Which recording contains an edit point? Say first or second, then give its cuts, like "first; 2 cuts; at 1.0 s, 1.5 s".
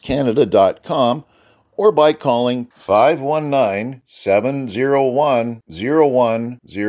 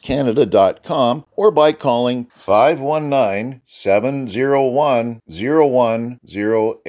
second; 1 cut; at 1.3 s